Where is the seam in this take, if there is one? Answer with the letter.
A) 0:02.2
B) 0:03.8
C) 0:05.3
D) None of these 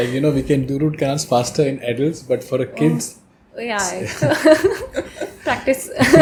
D